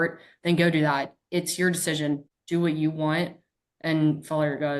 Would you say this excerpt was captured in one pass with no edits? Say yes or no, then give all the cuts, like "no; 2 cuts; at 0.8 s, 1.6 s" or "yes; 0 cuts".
no; 1 cut; at 2.3 s